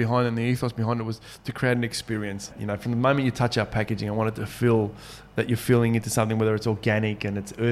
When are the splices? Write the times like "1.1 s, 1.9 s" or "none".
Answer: 2.6 s